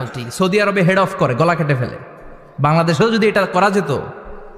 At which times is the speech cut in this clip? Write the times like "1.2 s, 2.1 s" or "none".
none